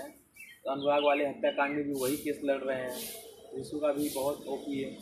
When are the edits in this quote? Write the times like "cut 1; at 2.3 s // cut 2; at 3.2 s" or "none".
none